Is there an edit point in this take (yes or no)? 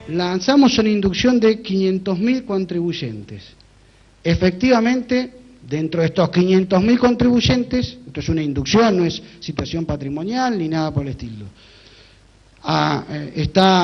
no